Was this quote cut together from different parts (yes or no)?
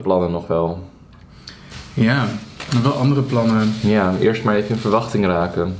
no